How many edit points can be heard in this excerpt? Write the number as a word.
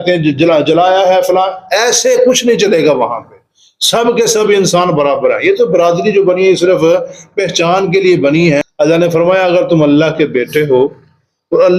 one